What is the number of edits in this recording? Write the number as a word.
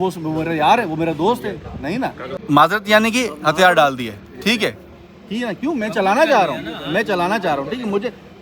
one